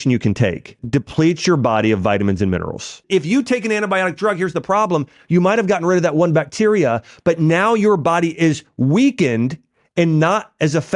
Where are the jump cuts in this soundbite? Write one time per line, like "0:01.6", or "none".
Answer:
0:00.8
0:03.0

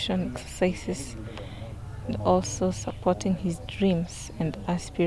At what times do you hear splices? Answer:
none

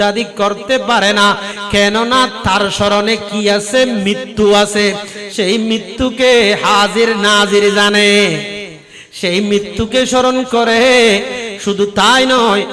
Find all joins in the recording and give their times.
none

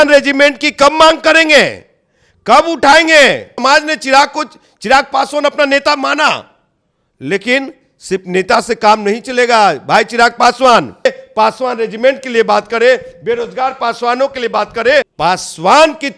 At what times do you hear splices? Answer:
0:03.5
0:11.1
0:15.1

